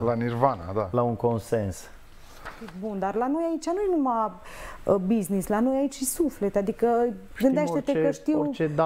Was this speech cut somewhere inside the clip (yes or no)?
yes